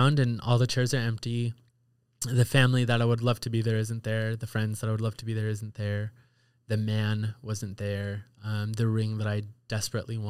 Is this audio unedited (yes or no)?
yes